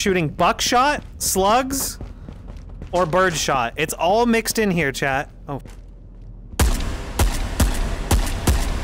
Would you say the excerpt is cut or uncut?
uncut